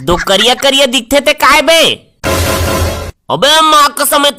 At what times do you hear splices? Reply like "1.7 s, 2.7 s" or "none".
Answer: none